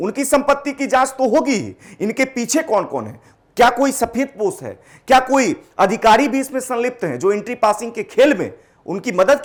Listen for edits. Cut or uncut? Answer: uncut